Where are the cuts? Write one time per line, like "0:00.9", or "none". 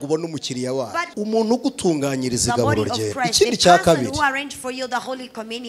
0:01.1